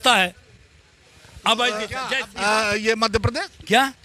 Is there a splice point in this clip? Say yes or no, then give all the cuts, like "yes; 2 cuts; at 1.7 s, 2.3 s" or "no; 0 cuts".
yes; 1 cut; at 2.2 s